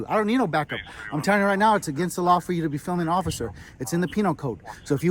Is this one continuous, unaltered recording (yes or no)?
yes